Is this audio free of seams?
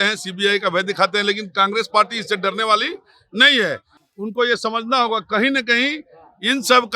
yes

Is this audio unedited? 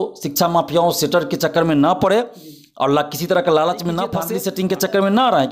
no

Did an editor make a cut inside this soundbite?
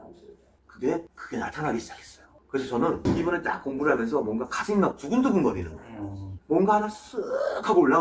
no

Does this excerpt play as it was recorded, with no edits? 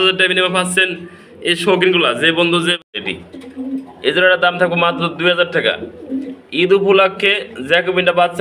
no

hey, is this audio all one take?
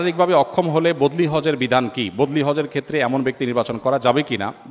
yes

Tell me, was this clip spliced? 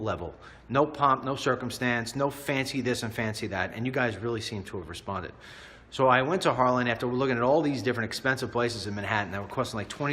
yes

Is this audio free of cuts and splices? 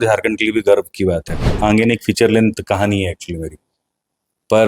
no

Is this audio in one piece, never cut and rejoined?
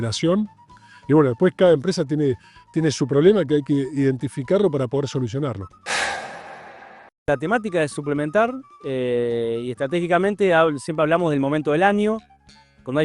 no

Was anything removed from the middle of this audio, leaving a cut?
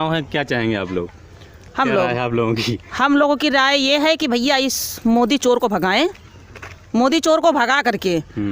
no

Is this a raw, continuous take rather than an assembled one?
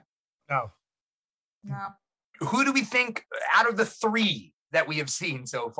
no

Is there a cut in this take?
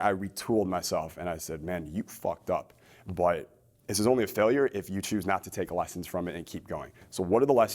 no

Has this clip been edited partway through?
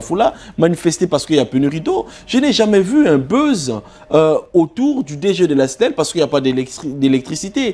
no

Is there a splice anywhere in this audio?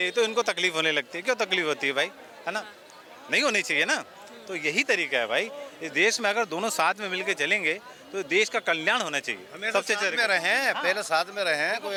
no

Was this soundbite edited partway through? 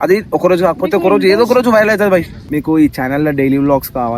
yes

